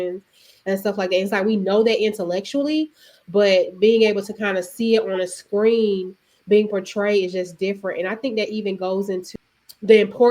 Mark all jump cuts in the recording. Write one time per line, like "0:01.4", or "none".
0:09.3